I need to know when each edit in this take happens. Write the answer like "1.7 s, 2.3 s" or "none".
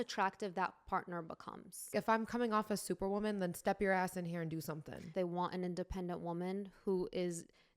1.9 s, 5.1 s